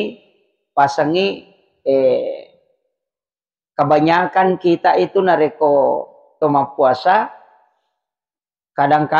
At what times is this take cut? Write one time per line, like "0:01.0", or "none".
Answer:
none

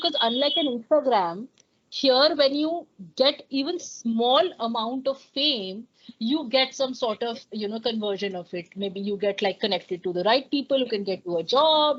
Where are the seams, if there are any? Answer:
none

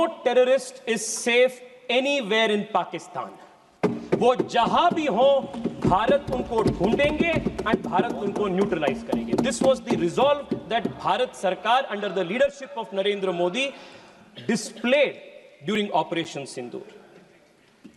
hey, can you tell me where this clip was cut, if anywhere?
none

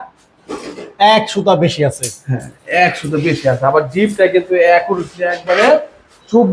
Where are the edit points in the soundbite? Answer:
none

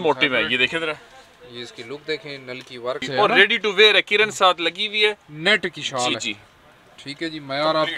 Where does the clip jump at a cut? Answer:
0:03.0

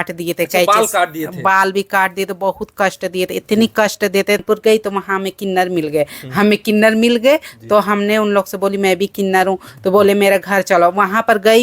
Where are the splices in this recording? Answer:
0:04.4

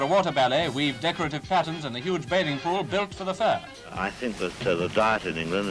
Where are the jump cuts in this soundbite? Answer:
0:03.9

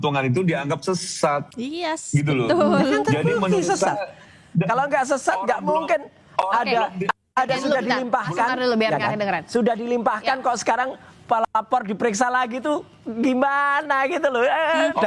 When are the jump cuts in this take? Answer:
none

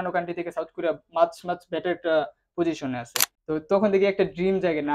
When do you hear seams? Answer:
0:03.3

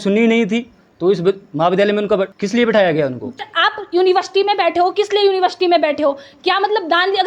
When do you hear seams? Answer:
0:02.3
0:03.5

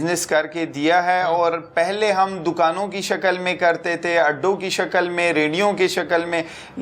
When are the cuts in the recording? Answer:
none

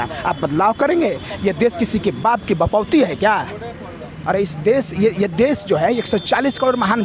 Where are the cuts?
none

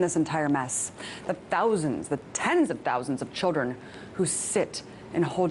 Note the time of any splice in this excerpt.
0:03.7

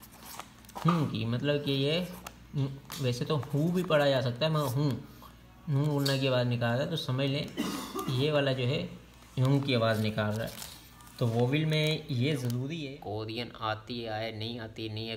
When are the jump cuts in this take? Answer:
0:12.8

